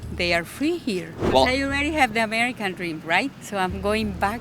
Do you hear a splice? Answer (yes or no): yes